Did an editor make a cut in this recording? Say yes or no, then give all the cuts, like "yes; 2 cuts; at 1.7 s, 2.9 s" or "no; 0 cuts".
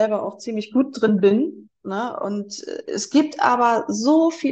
no; 0 cuts